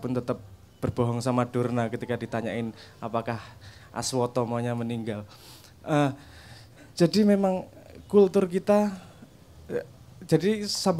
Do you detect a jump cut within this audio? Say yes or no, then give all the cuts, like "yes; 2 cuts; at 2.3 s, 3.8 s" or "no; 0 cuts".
no; 0 cuts